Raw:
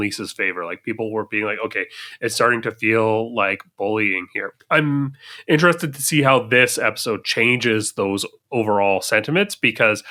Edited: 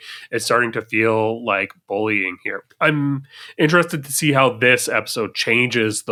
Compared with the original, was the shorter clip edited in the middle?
no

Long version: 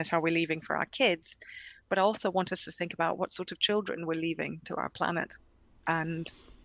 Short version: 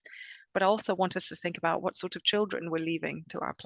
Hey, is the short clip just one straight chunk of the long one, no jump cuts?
yes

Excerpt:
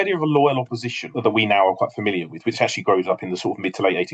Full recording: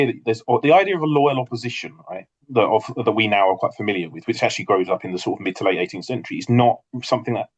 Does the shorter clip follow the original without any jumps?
no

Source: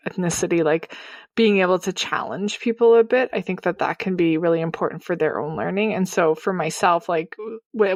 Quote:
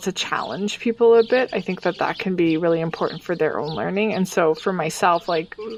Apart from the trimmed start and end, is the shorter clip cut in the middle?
no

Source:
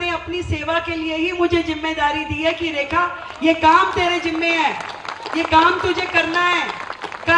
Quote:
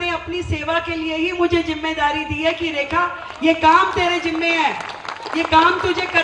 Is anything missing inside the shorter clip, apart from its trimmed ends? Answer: no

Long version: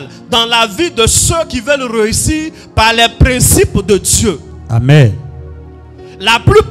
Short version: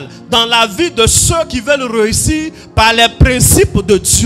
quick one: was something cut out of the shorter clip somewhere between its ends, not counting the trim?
no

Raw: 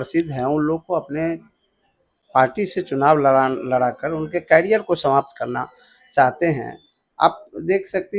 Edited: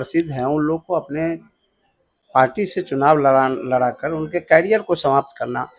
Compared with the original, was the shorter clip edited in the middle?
no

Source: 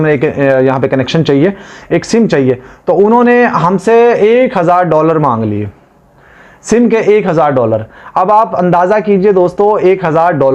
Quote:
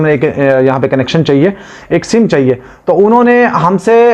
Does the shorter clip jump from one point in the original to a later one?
no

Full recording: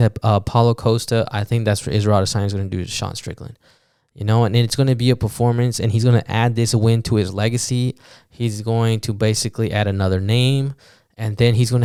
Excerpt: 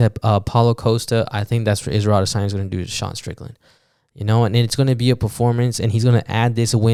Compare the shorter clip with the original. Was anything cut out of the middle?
no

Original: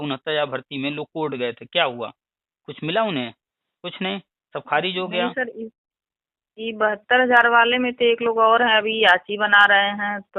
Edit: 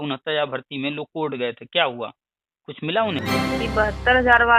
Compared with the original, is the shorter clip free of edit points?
no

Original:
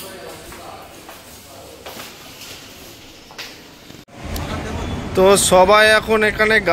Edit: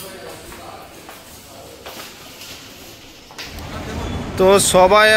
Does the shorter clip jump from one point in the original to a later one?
yes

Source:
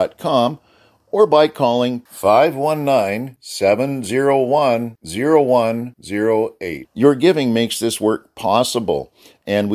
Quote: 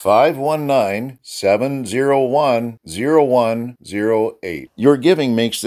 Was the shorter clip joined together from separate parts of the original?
no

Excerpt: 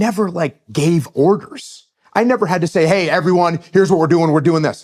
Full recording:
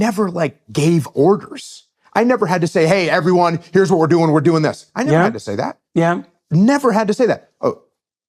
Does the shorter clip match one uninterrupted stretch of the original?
yes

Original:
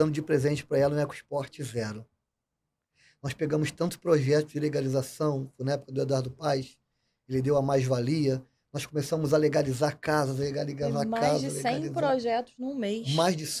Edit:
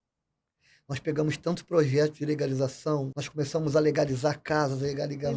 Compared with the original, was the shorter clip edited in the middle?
yes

